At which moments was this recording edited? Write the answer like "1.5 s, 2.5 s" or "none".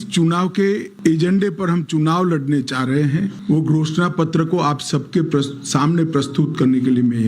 0.9 s, 3.4 s

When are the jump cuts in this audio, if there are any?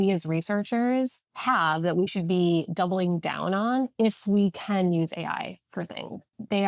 1.3 s, 5.7 s

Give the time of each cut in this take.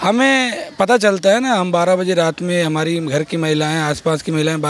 none

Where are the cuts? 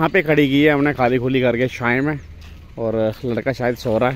none

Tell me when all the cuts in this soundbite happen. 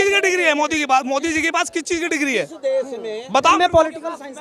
none

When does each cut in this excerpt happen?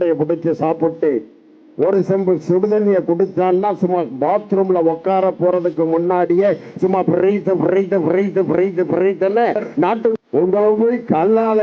10.2 s

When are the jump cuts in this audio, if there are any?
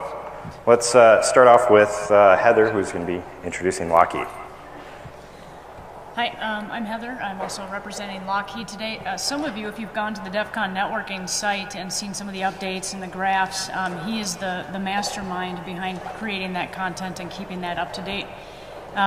none

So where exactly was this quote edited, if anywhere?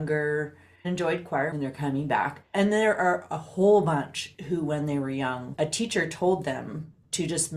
5.5 s

